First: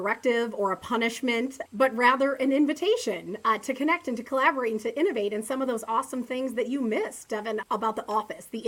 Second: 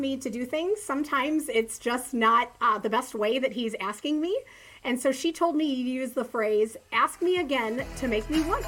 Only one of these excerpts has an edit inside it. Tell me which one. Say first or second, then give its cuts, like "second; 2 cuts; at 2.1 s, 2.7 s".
first; 2 cuts; at 1.6 s, 7.6 s